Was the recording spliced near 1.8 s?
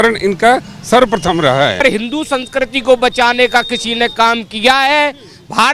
yes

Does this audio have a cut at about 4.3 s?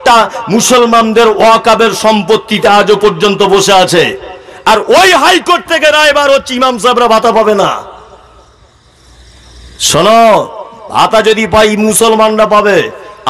no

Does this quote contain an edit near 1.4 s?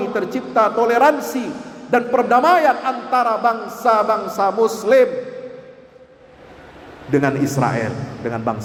no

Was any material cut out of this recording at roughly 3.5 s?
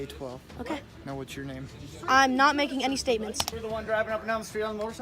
yes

